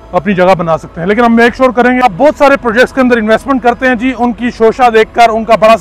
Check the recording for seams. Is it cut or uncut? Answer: cut